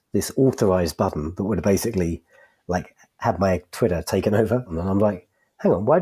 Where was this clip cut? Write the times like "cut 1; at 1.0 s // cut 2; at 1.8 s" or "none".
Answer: cut 1; at 4.8 s